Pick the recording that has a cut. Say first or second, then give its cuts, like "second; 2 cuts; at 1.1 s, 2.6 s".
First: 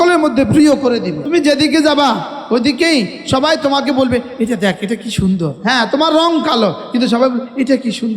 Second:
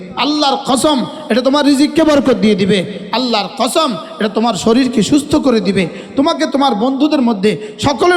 first; 2 cuts; at 1.2 s, 5.6 s